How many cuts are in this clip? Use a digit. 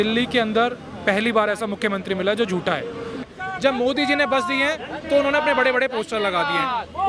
1